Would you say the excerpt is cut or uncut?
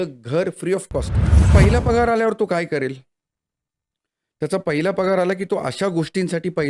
cut